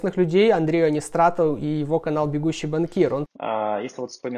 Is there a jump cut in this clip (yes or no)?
yes